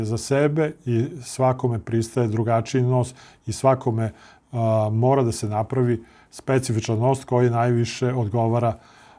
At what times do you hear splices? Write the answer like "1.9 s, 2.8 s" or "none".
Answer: none